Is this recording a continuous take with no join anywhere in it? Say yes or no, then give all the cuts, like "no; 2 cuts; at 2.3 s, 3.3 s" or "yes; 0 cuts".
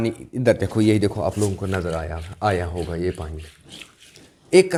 yes; 0 cuts